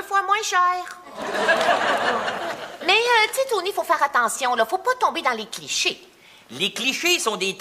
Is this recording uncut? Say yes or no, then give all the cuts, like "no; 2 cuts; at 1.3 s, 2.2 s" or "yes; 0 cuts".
no; 1 cut; at 5.5 s